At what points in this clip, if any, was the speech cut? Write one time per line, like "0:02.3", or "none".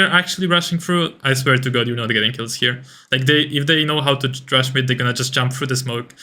none